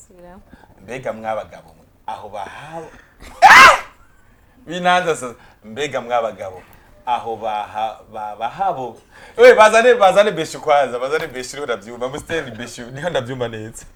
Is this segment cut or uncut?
uncut